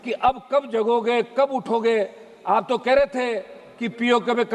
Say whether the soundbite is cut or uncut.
uncut